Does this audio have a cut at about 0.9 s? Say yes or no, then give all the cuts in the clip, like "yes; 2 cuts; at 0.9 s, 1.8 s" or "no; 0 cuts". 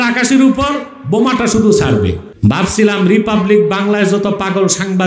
no; 1 cut; at 2.3 s